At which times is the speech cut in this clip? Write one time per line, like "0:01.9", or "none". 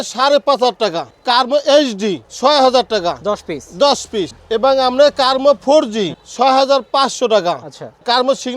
none